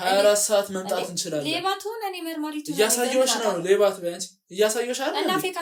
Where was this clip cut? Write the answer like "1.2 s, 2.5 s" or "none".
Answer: none

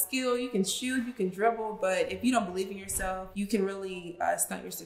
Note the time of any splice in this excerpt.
3.3 s

